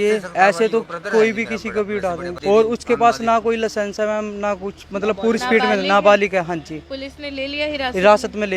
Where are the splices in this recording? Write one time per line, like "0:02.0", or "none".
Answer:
0:02.5